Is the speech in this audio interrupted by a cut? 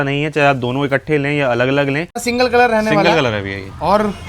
yes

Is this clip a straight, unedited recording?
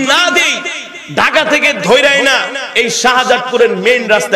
yes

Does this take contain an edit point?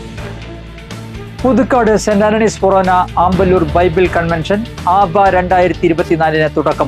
no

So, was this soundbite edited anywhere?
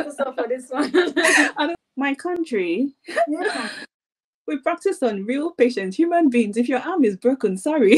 yes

